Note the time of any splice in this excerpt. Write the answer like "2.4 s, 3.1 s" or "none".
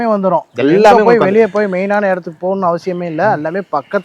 none